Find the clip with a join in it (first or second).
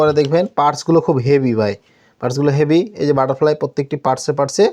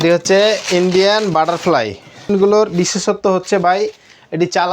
second